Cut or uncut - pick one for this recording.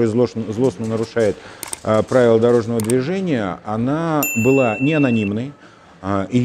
uncut